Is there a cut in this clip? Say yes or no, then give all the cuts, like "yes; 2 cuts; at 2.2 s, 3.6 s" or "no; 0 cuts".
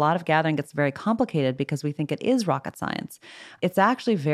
yes; 1 cut; at 3.4 s